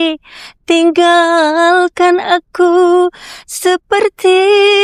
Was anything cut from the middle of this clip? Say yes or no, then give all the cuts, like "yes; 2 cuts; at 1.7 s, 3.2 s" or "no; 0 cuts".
no; 0 cuts